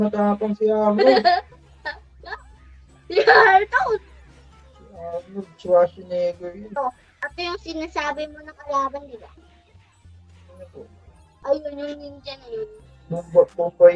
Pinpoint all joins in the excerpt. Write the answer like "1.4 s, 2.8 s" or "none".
6.8 s